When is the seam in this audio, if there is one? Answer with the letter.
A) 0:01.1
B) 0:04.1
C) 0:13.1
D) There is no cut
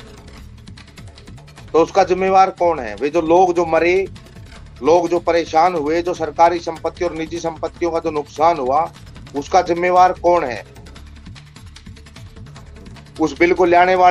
A